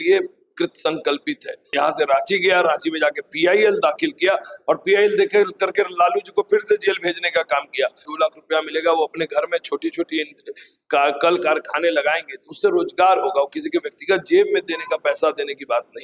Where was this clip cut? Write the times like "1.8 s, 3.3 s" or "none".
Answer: 1.7 s, 8.1 s